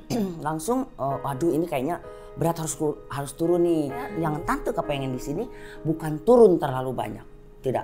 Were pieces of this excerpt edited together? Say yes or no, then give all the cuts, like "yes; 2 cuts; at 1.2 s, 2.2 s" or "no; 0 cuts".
yes; 1 cut; at 4.1 s